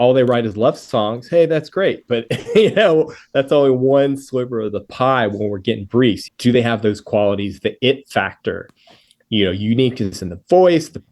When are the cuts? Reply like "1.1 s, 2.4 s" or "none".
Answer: 6.2 s

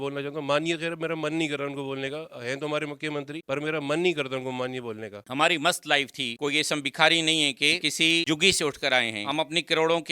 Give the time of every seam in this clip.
5.2 s, 7.8 s

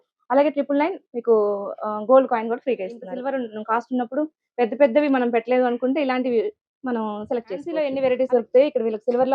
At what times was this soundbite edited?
3.1 s, 7.7 s

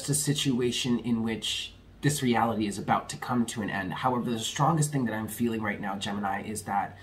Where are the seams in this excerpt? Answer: none

